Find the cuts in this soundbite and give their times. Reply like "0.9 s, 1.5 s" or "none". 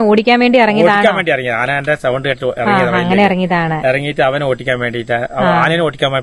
none